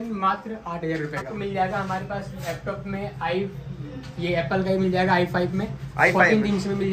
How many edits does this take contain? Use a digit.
1